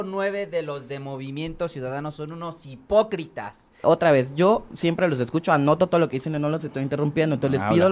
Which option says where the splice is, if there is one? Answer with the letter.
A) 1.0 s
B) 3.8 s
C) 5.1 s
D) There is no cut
B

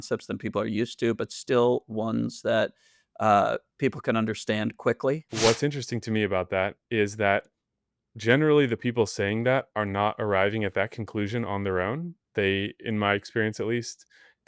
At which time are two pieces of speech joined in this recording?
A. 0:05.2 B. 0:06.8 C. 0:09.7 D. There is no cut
A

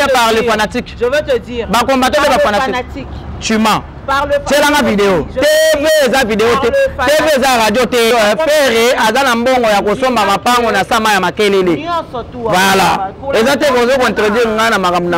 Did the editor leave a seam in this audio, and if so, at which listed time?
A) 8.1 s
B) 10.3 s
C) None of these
A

